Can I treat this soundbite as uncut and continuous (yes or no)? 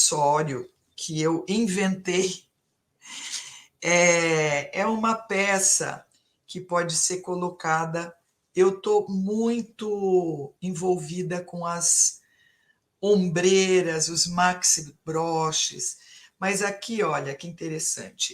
yes